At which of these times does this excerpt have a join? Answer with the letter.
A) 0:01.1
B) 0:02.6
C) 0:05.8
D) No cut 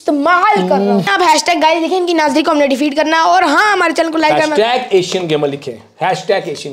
A